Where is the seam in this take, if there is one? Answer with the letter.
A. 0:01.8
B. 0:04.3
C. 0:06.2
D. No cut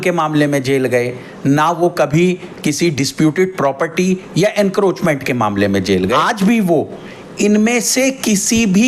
C